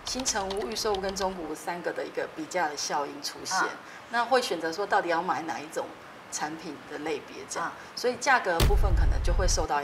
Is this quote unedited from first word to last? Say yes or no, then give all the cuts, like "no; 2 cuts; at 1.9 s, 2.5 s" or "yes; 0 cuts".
yes; 0 cuts